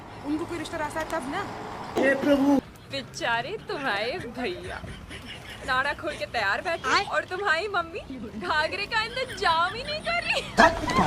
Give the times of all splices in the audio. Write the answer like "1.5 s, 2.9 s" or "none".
none

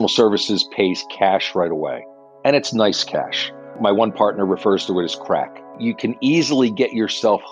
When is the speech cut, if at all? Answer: 3.8 s, 5.8 s

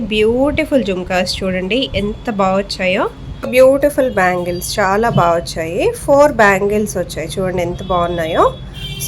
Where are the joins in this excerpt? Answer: 3.5 s

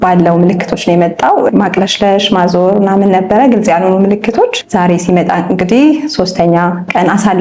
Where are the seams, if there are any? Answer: 1.5 s, 4.6 s

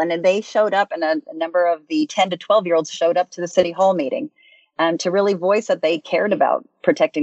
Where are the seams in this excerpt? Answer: 2.1 s

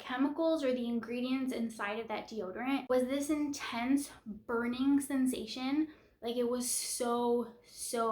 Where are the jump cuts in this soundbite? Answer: 2.9 s

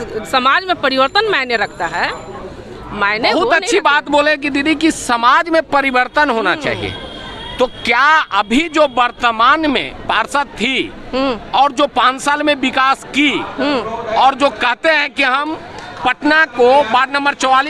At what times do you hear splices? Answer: none

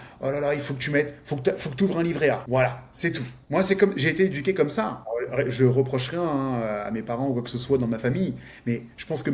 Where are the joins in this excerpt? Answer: 2.4 s, 3.3 s, 5.0 s

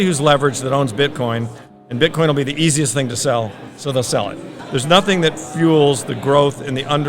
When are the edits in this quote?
4.5 s

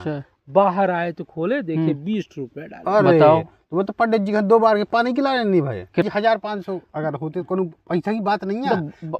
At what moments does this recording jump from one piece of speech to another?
6.0 s

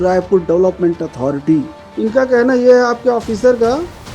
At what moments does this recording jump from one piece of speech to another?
1.8 s

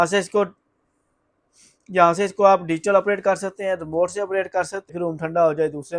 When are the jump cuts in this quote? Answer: 4.9 s

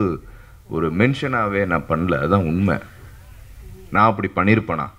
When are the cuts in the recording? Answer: none

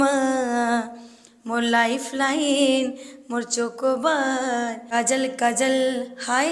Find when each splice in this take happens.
4.8 s

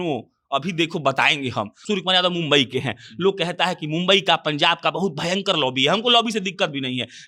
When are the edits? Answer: 1.8 s

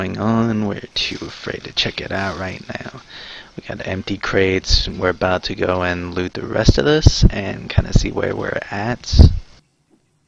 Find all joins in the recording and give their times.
none

